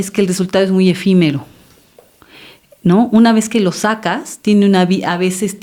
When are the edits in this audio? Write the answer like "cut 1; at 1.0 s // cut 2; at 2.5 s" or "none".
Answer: none